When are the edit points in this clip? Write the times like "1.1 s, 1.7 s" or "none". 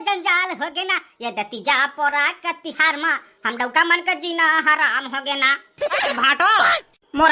6.1 s